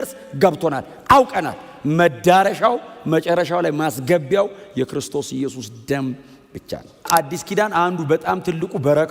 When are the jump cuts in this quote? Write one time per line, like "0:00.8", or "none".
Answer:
0:07.1